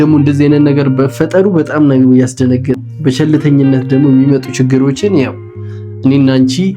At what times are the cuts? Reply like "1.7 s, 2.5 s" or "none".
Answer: 2.8 s